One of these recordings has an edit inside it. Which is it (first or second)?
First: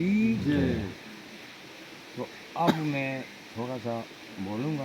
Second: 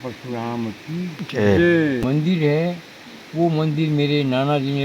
second